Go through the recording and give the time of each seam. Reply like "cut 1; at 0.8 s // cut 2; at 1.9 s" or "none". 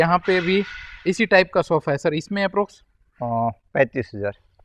none